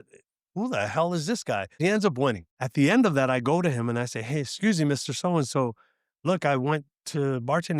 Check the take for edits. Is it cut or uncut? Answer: cut